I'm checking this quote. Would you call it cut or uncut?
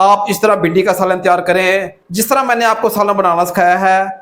cut